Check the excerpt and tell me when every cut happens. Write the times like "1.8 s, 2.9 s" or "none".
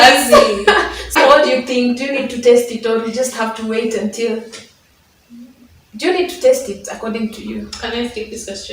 1.2 s